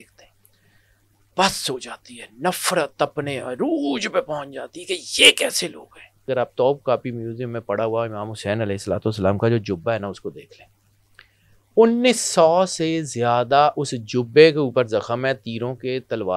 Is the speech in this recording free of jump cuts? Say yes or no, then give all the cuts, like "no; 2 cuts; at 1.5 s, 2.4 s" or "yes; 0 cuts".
no; 1 cut; at 6.3 s